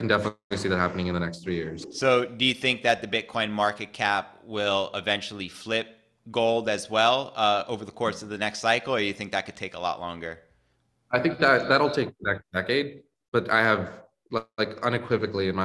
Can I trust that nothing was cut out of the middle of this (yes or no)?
yes